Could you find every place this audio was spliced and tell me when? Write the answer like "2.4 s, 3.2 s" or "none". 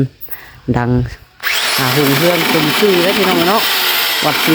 none